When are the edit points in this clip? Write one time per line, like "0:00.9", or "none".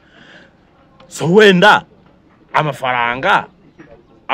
none